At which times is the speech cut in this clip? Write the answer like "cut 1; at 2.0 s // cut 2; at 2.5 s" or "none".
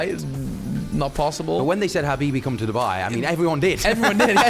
none

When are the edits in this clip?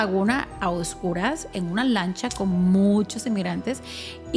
none

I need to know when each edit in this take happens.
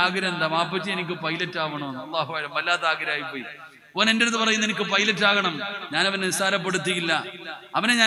none

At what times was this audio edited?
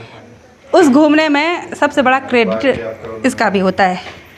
none

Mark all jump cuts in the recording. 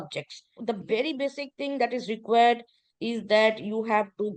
none

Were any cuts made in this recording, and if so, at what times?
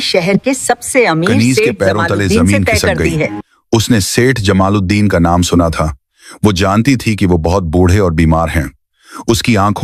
none

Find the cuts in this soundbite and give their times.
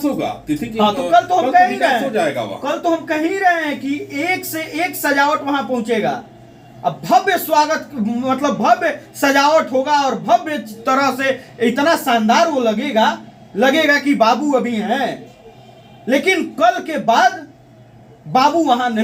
none

